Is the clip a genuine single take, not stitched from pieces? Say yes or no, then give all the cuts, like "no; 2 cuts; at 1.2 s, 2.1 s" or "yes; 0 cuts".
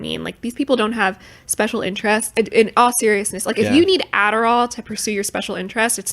no; 1 cut; at 2.3 s